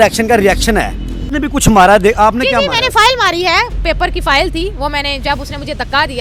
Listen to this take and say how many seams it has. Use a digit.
1